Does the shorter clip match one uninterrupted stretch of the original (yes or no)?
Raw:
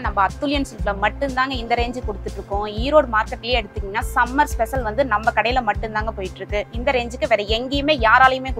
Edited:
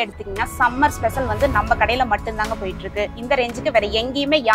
yes